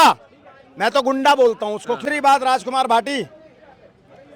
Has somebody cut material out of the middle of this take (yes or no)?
yes